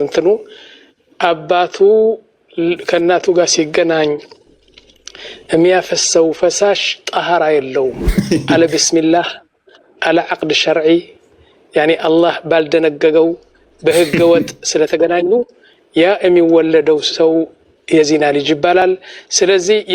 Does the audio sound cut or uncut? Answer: cut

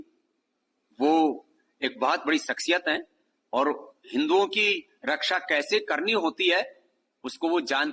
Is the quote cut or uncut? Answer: uncut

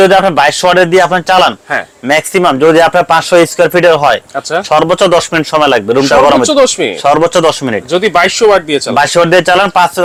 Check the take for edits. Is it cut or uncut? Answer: uncut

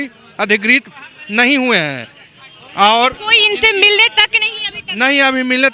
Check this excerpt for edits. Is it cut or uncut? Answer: uncut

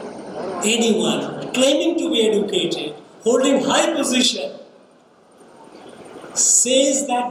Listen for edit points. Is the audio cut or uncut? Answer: uncut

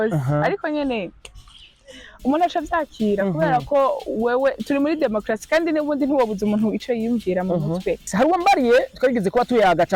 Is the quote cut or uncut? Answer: cut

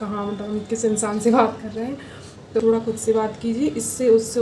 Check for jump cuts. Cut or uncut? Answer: cut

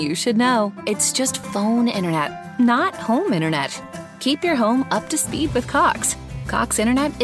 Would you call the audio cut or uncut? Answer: uncut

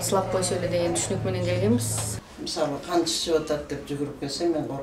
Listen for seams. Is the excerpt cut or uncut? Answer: cut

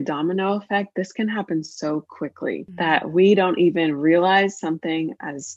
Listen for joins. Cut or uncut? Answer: cut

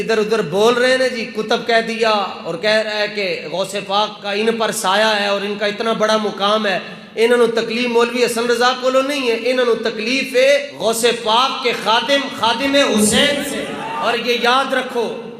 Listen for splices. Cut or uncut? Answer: uncut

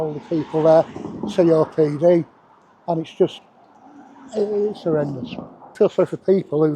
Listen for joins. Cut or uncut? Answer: cut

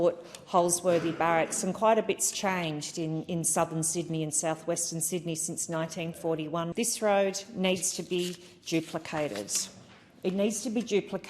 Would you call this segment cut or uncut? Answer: cut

